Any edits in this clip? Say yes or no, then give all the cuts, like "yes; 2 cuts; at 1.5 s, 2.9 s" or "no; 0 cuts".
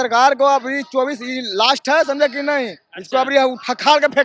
no; 0 cuts